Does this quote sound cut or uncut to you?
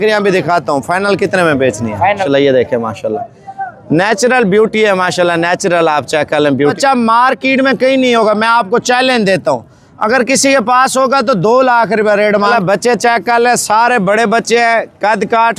cut